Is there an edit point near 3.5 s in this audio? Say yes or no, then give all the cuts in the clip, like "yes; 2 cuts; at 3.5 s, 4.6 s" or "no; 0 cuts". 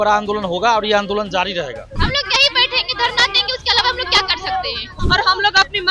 no; 2 cuts; at 2.0 s, 4.9 s